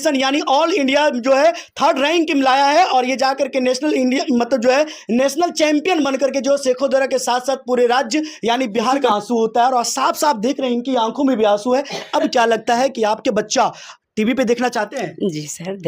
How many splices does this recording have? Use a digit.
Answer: 1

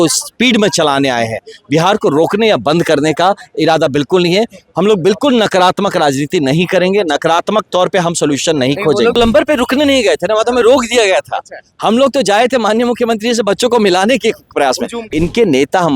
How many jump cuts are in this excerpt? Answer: 2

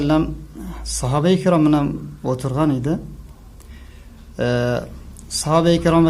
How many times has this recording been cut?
1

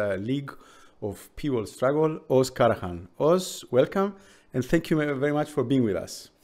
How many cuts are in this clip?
0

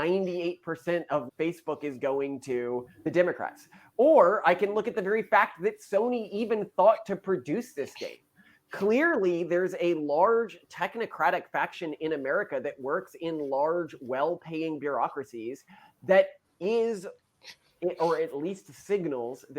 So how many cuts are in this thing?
1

